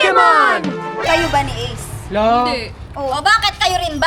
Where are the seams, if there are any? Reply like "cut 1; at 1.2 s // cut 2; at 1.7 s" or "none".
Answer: cut 1; at 1.0 s